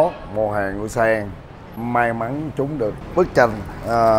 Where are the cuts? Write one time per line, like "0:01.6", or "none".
0:01.8
0:03.0